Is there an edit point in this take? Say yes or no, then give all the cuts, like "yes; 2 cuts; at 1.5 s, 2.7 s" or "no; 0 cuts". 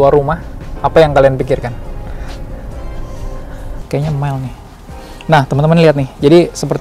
yes; 1 cut; at 3.8 s